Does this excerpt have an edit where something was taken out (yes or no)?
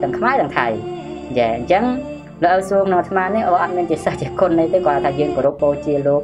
no